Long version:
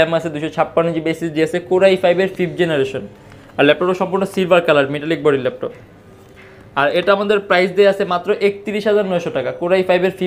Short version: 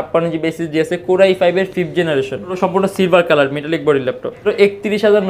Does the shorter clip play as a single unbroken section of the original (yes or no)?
no